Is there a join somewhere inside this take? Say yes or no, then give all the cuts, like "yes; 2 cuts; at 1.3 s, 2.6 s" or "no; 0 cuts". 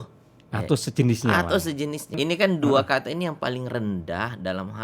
yes; 1 cut; at 2.2 s